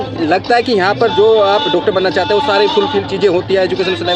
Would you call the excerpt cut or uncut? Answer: uncut